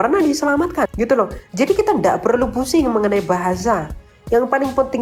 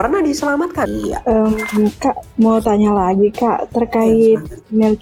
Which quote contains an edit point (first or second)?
second